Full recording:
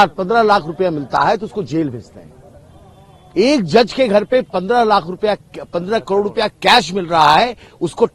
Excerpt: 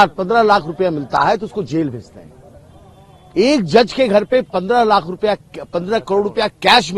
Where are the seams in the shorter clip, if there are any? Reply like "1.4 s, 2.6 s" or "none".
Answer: none